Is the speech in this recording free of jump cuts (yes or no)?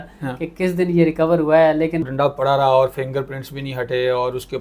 no